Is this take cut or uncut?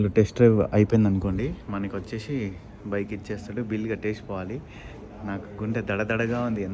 uncut